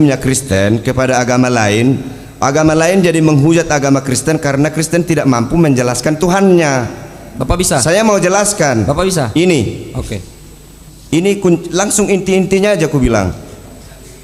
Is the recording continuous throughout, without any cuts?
yes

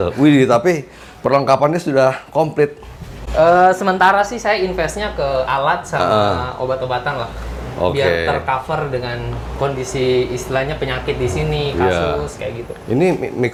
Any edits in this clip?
no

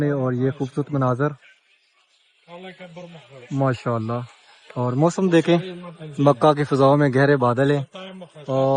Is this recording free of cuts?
yes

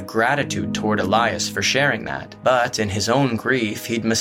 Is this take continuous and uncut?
no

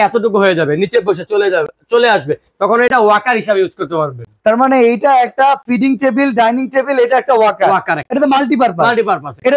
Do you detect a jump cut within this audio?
no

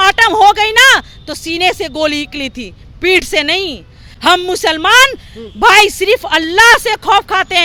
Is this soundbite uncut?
yes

